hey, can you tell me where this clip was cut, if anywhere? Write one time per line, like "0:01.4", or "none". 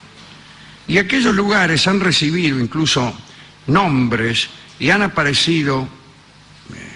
0:05.2